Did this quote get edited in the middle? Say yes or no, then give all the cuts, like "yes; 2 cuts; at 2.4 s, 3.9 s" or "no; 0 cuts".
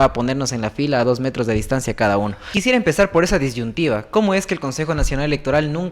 yes; 1 cut; at 2.5 s